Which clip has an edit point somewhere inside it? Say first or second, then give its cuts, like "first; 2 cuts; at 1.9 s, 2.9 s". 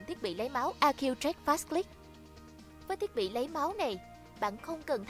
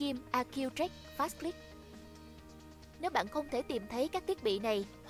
first; 2 cuts; at 0.8 s, 1.9 s